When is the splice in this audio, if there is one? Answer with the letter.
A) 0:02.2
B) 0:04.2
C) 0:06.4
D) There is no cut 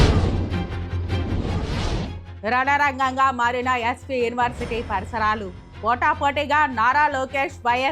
A